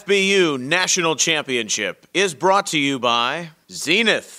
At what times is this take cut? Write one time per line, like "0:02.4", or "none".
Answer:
none